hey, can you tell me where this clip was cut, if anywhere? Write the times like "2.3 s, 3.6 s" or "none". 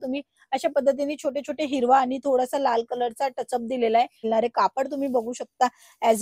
4.2 s